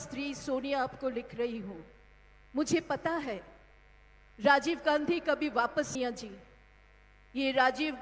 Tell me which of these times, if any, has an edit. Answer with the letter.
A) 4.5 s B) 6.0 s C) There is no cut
B